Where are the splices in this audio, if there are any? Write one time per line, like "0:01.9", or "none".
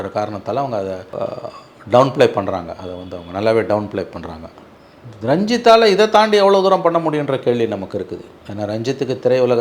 0:01.1